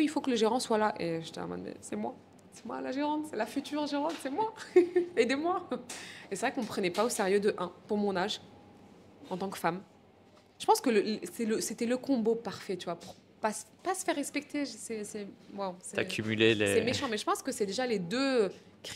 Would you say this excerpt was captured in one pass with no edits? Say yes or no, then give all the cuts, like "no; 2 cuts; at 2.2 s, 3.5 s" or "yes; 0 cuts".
yes; 0 cuts